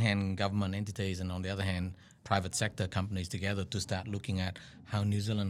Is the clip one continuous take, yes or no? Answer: no